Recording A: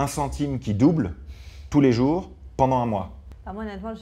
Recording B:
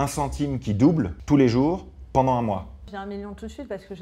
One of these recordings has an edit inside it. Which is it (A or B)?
B